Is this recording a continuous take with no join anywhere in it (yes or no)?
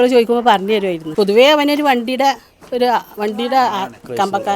no